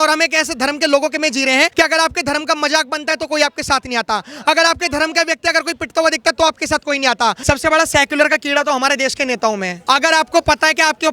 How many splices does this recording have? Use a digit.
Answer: 3